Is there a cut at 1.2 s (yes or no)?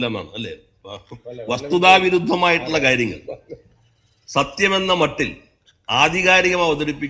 no